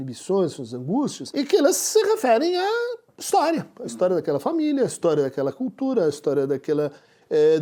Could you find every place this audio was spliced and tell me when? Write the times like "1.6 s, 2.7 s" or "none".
1.2 s